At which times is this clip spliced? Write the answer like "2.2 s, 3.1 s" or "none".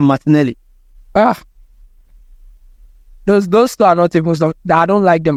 none